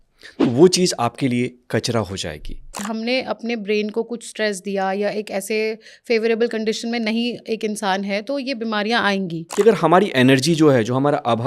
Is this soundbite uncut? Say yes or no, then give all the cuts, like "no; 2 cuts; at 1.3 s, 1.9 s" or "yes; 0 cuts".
no; 2 cuts; at 2.8 s, 9.4 s